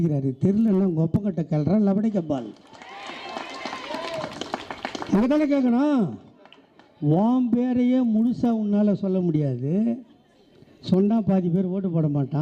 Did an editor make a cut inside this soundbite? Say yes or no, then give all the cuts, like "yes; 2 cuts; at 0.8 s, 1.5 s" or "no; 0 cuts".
no; 0 cuts